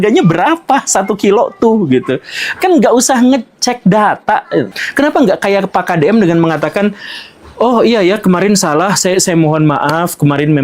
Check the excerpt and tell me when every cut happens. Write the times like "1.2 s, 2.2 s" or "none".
4.8 s